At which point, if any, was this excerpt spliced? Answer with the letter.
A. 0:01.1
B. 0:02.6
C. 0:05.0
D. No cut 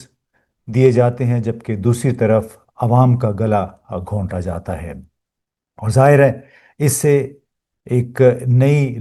D